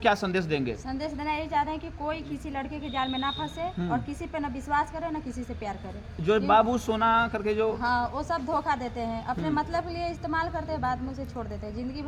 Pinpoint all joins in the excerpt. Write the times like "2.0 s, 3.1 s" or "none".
none